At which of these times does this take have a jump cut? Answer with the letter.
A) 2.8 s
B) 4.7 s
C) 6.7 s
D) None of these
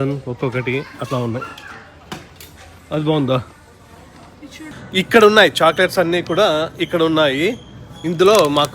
B